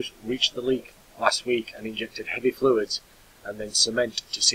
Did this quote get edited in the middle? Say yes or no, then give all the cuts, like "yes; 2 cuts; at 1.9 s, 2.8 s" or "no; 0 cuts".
no; 0 cuts